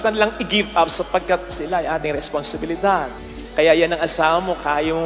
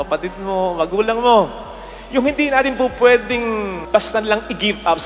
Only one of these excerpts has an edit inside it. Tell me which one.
first; 1 cut; at 3.2 s

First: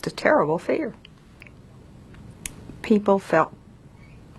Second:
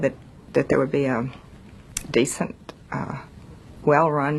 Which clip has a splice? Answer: first; 1 cut; at 1.4 s

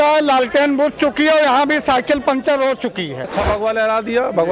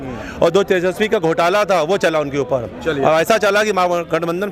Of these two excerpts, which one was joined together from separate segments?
first; 1 cut; at 3.4 s

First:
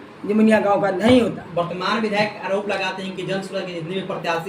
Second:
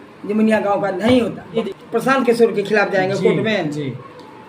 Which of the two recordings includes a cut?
second; 1 cut; at 1.8 s

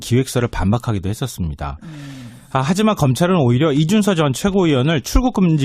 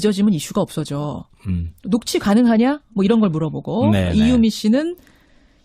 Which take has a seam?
first; 1 cut; at 2.1 s

